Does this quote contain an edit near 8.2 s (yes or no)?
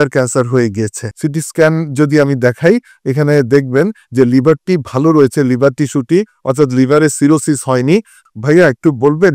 yes